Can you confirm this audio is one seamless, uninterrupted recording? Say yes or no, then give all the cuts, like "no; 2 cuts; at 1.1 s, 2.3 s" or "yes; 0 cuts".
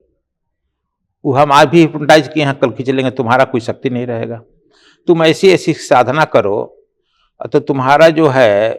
yes; 0 cuts